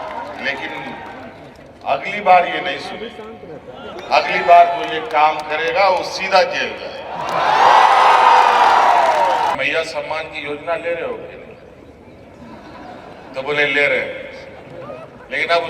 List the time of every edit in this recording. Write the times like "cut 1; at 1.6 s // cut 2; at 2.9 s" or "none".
cut 1; at 9.6 s